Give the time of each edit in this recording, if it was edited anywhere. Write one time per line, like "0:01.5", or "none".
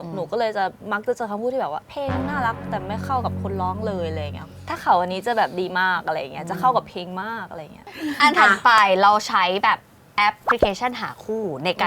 0:07.7